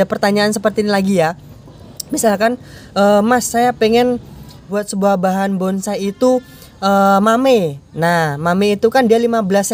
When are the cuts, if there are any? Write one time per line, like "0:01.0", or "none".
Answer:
0:04.8